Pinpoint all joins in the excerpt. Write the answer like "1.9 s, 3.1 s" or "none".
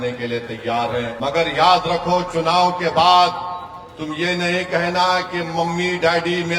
1.1 s